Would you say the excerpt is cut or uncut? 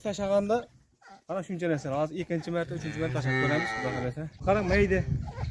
cut